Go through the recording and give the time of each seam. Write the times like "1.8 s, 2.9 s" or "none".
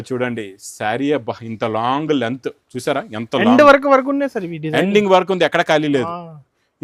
none